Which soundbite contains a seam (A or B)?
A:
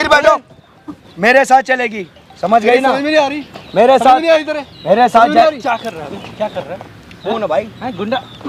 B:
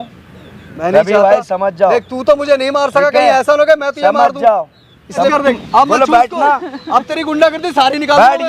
B